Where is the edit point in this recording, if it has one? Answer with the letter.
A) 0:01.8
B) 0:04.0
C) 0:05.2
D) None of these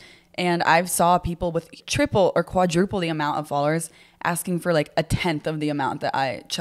A